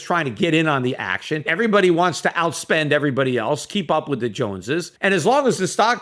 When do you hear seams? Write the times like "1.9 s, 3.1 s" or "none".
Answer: 1.5 s, 4.9 s